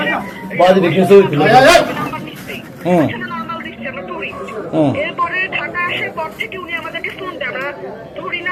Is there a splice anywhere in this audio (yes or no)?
no